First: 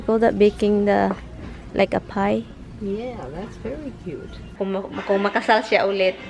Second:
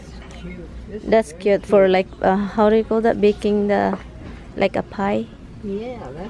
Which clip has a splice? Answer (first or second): first